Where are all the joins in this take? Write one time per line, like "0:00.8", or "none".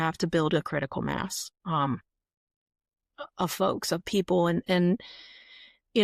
none